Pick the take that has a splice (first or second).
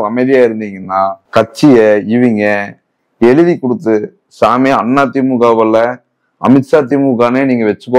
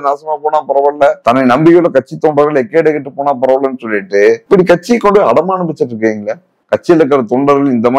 second